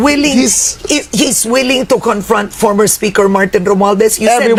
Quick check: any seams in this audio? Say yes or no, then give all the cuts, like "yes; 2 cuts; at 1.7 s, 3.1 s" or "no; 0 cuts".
no; 0 cuts